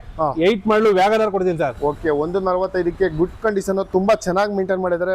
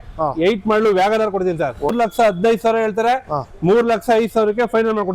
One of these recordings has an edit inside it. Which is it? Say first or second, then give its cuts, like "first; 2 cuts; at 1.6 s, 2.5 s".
second; 1 cut; at 1.9 s